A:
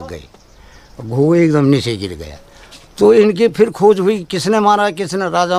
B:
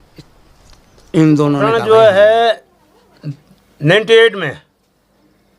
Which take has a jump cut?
B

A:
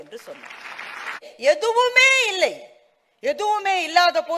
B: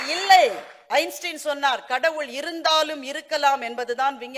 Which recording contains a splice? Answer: A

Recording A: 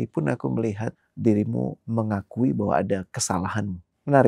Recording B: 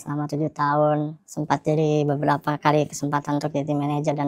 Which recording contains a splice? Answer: A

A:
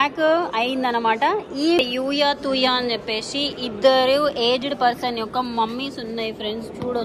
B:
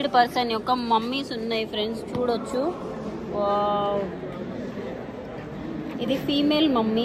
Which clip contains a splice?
A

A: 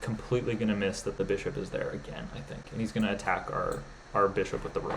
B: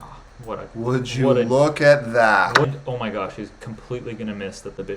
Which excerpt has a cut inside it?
B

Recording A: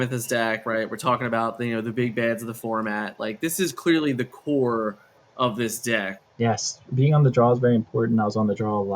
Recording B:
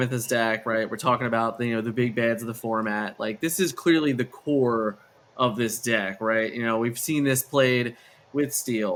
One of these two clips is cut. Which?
A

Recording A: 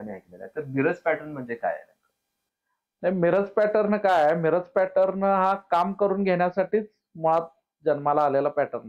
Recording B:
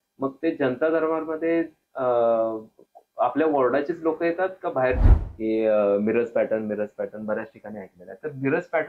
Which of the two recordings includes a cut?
B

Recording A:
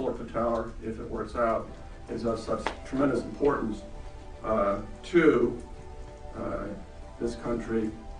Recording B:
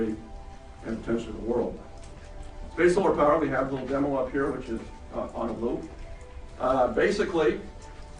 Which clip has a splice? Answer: A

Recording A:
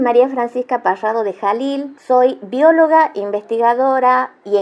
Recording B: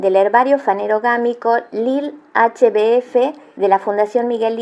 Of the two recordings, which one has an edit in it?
A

